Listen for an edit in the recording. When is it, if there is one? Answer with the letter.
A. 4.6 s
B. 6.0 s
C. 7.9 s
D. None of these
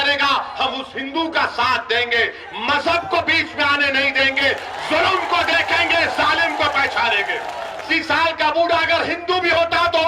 C